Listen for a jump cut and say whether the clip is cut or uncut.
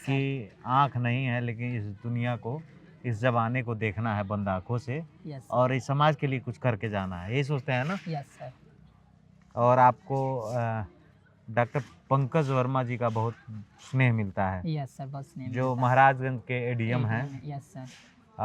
uncut